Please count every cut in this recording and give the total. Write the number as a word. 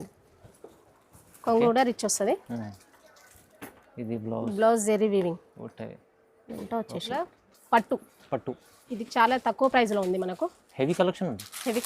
one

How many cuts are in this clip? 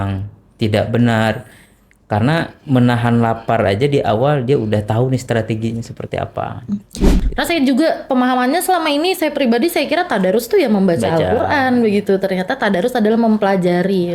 one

